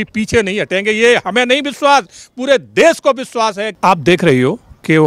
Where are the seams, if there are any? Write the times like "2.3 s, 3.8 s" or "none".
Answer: 3.7 s

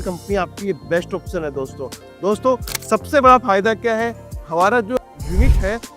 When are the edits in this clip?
5.0 s

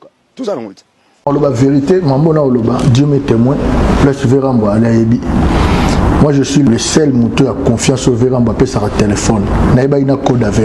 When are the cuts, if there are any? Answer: 1.2 s

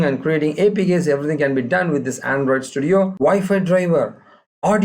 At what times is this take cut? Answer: 3.1 s

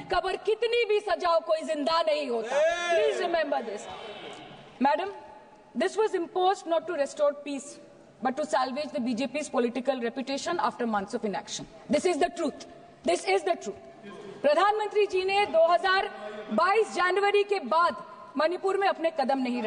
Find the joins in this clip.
none

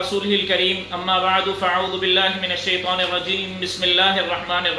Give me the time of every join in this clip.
none

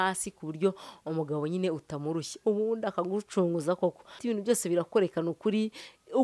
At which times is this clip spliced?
none

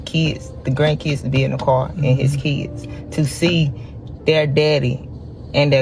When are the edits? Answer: none

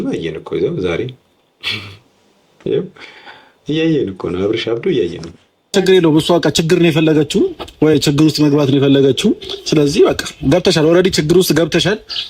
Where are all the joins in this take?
5.7 s

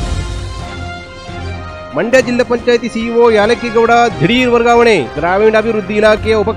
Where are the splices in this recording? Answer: 1.8 s

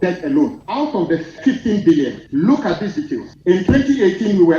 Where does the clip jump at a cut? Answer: 1.0 s, 2.2 s, 3.3 s

